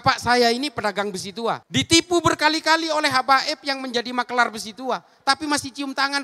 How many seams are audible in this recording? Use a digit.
0